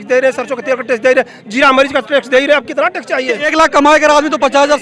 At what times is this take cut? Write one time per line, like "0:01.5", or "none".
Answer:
0:03.4